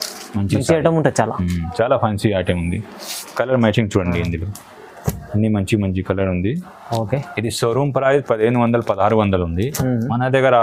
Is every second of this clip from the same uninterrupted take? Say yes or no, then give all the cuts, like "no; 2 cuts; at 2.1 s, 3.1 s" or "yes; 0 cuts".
yes; 0 cuts